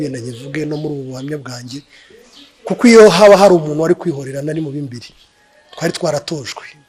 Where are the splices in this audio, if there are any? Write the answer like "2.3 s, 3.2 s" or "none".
none